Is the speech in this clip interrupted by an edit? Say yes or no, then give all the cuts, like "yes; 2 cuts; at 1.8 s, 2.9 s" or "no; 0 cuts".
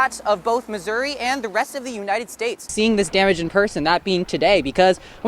yes; 1 cut; at 2.7 s